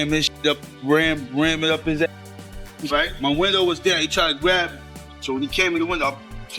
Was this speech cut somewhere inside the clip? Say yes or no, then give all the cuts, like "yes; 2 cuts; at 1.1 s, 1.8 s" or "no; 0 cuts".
no; 0 cuts